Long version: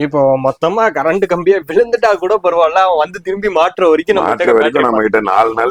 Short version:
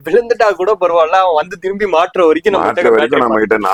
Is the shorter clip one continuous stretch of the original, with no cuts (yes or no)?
yes